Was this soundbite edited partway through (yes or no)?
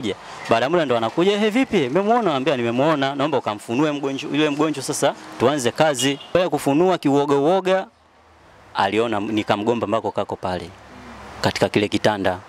yes